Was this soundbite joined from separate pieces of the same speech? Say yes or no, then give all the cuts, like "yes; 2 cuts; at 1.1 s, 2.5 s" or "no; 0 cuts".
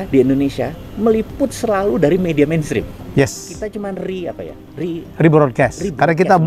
no; 0 cuts